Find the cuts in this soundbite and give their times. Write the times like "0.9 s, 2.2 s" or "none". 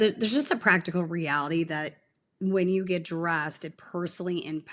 none